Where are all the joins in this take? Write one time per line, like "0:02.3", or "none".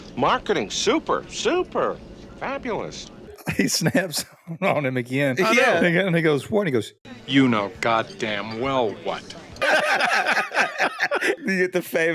0:03.3
0:11.4

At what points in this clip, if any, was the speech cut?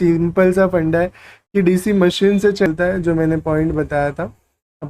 0:02.7

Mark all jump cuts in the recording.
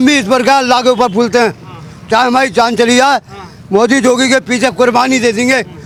none

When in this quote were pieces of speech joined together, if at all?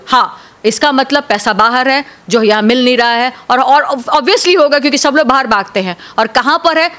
none

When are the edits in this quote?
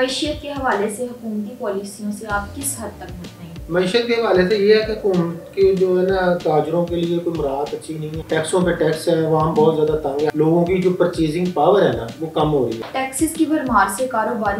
0:08.1
0:10.3
0:12.9

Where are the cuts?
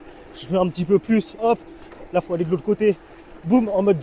none

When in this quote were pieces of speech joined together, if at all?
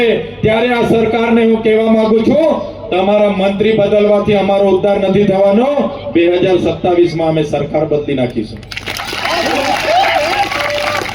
none

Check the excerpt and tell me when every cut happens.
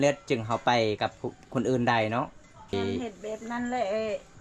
0:02.7

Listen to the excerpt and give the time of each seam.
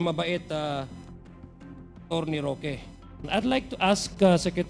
0:03.3

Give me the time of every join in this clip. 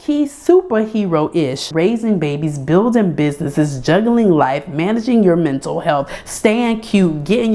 0:01.7

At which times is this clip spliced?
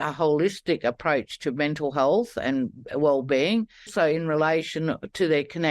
0:03.9

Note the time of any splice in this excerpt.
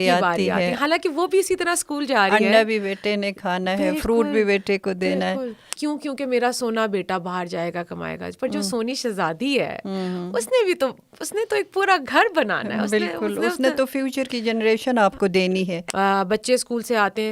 0:05.6
0:15.8

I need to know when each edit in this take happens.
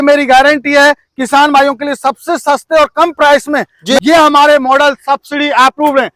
0:04.0

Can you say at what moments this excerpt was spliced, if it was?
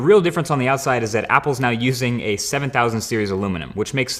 none

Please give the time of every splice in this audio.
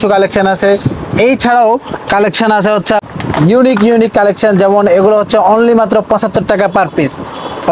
none

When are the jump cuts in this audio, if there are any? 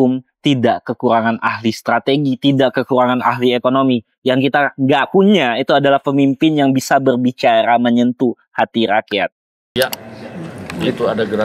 0:09.6

